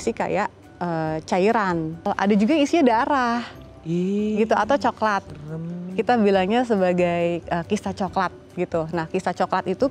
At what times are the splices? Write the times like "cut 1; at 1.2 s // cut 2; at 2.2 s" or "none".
cut 1; at 2.1 s

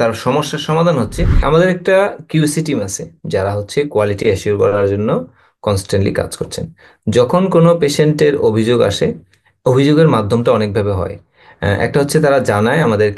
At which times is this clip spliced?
cut 1; at 1.4 s

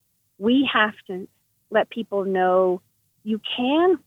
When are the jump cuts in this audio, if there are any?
cut 1; at 1.1 s

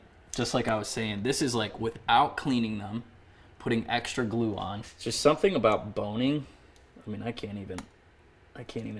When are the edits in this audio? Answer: cut 1; at 4.9 s

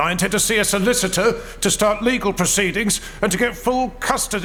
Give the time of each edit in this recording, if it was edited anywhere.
none

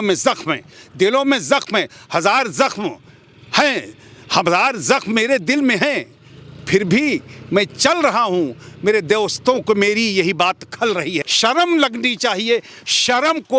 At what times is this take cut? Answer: cut 1; at 11.3 s

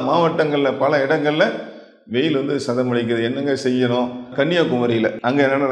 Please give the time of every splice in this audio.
cut 1; at 4.2 s

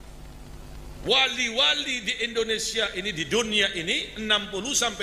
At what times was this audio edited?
none

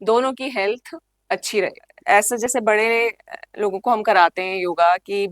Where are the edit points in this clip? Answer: cut 1; at 1.9 s

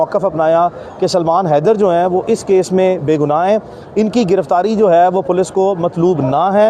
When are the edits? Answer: none

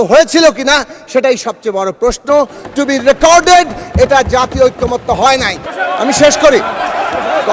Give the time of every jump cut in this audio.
cut 1; at 5.7 s

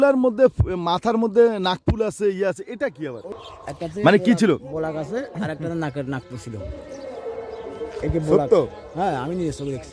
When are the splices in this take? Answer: cut 1; at 3.3 s

